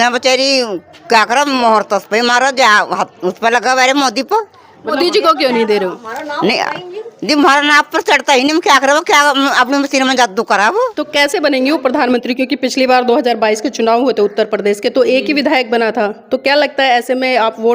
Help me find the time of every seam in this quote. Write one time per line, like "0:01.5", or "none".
0:04.9
0:11.0